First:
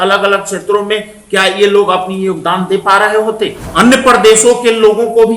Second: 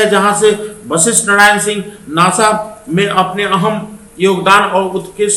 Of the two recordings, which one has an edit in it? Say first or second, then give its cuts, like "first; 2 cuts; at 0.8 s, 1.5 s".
first; 1 cut; at 3.6 s